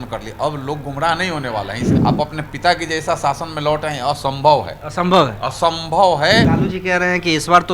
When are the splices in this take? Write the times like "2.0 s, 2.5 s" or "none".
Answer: 1.9 s, 6.5 s